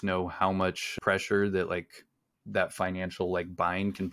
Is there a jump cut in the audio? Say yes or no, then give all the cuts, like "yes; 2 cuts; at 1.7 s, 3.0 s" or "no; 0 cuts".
yes; 1 cut; at 1.0 s